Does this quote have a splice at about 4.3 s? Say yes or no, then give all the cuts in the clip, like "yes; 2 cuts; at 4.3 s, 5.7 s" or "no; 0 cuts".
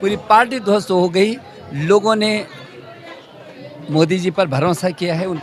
no; 0 cuts